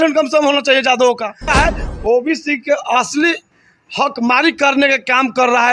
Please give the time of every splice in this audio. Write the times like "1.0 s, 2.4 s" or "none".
1.5 s